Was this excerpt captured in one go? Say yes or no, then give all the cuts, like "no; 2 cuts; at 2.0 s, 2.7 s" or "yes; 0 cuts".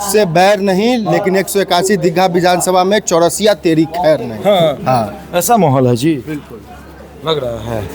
yes; 0 cuts